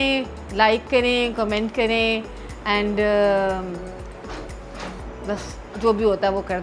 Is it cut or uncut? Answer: uncut